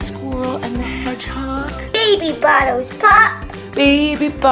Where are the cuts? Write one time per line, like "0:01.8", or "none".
0:01.9